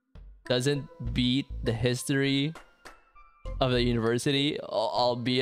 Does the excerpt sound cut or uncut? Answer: uncut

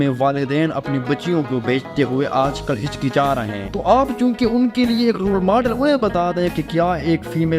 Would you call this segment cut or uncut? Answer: cut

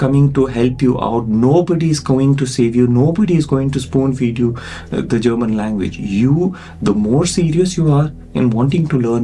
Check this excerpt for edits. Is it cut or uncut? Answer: uncut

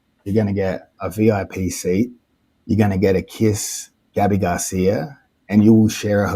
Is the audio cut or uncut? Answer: cut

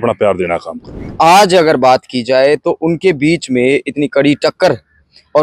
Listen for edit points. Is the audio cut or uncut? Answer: cut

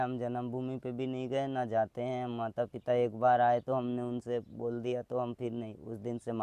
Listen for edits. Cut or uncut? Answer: uncut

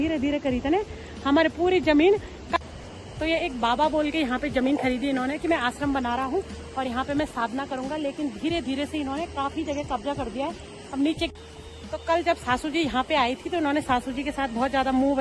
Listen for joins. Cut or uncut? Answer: cut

